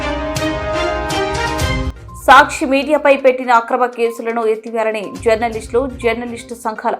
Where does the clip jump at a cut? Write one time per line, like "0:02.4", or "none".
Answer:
0:01.0